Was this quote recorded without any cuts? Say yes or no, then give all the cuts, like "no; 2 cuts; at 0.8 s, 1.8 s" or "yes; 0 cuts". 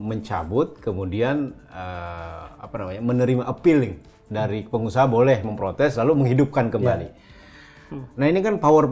yes; 0 cuts